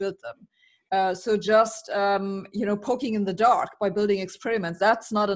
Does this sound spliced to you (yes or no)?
no